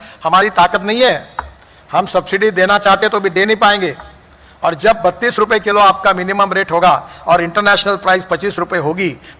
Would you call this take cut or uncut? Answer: uncut